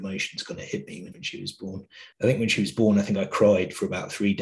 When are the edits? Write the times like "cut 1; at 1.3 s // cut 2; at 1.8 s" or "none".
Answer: none